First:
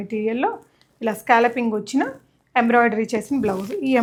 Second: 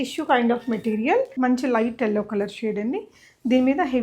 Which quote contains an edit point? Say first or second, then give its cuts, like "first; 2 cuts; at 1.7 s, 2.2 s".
second; 1 cut; at 1.3 s